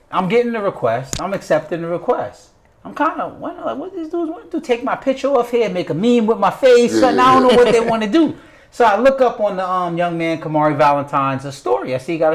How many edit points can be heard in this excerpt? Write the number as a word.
zero